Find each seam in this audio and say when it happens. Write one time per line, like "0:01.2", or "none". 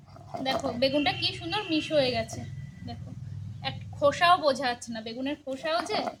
none